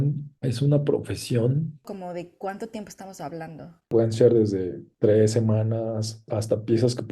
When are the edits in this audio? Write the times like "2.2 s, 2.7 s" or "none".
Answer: 1.8 s, 3.9 s, 4.8 s, 6.2 s